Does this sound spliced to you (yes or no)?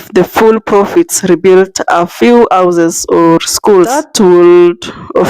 yes